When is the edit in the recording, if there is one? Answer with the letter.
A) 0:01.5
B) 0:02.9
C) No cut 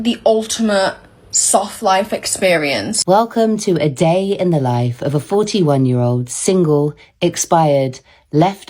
B